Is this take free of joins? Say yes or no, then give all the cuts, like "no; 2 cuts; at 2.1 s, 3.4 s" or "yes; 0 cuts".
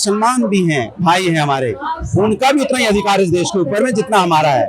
yes; 0 cuts